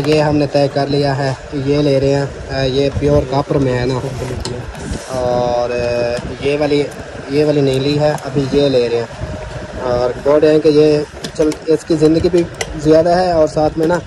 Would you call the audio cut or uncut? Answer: uncut